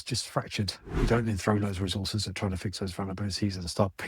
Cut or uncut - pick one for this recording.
cut